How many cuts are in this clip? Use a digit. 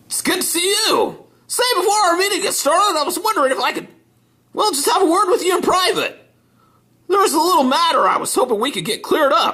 0